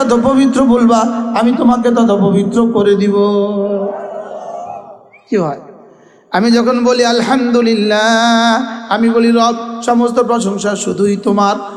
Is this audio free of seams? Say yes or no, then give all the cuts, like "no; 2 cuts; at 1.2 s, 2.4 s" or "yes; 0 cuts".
yes; 0 cuts